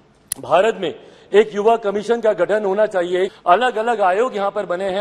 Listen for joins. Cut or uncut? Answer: cut